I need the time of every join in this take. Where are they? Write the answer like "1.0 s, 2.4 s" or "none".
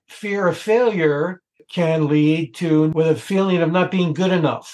1.6 s, 2.9 s